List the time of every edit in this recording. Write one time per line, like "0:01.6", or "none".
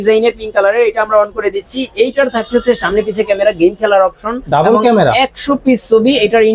none